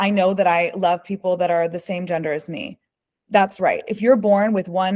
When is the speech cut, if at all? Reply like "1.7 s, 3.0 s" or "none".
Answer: none

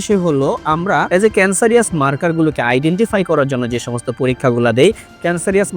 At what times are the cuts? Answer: 1.1 s

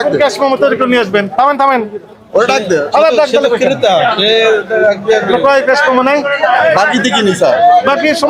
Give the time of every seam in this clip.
none

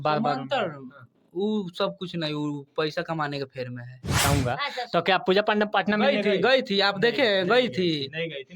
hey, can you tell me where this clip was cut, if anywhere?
4.2 s

